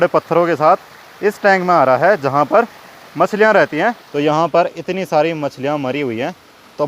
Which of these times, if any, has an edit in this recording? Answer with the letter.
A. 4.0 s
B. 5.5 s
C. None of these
A